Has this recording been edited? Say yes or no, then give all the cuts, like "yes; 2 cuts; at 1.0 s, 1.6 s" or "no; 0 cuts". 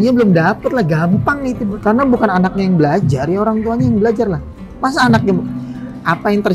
yes; 1 cut; at 1.6 s